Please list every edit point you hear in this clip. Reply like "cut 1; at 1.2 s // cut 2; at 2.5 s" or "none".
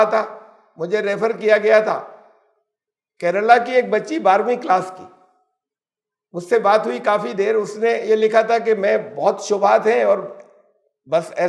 none